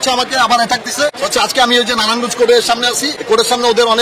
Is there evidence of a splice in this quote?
no; 0 cuts

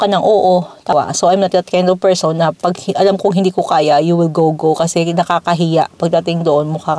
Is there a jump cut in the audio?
yes; 1 cut; at 0.9 s

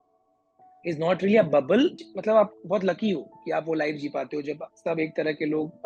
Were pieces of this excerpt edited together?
no; 0 cuts

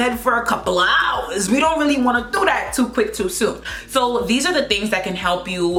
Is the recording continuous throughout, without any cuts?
yes; 0 cuts

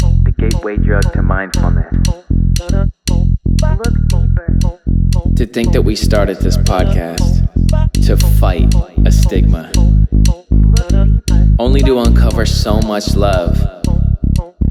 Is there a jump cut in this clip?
no; 0 cuts

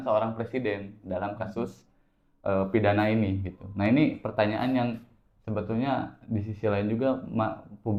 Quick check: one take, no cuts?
yes; 0 cuts

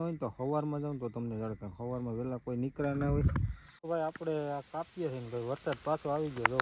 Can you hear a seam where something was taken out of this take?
yes; 1 cut; at 3.9 s

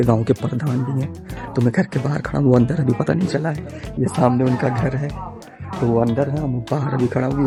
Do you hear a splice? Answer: no; 0 cuts

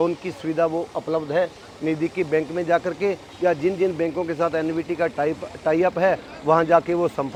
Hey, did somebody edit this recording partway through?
no; 0 cuts

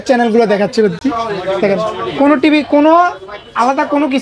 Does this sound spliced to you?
no; 0 cuts

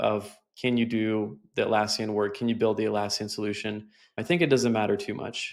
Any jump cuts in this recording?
yes; 1 cut; at 4.2 s

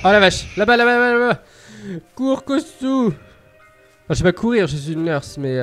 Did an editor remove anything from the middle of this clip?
no; 0 cuts

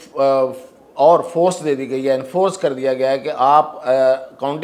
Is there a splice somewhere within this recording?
no; 0 cuts

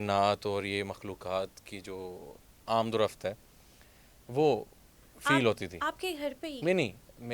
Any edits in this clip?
no; 0 cuts

